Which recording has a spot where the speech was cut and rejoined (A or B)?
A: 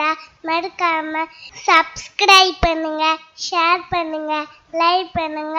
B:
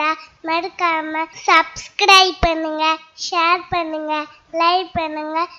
B